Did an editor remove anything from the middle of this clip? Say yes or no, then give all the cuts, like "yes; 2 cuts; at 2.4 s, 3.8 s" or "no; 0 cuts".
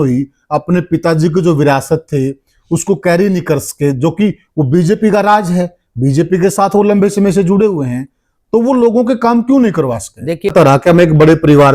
yes; 1 cut; at 10.5 s